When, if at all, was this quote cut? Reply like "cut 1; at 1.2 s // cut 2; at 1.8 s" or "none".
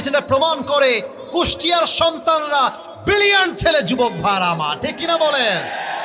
none